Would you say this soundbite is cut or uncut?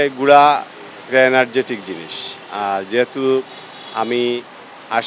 uncut